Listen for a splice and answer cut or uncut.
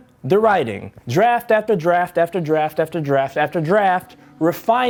uncut